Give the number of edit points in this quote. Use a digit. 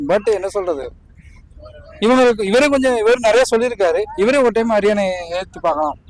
0